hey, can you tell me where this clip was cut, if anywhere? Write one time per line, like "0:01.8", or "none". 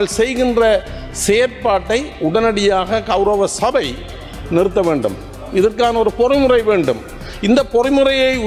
none